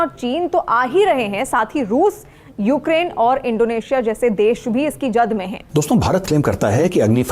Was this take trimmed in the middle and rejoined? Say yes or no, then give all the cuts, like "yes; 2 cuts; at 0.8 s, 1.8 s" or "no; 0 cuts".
yes; 1 cut; at 5.6 s